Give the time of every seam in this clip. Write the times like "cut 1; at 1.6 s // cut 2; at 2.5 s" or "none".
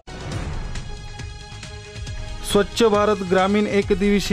none